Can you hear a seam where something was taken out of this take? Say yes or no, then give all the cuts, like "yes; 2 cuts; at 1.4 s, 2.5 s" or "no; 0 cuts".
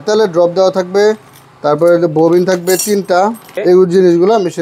yes; 1 cut; at 3.5 s